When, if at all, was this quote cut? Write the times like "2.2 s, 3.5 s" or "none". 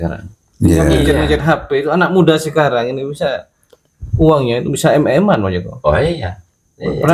none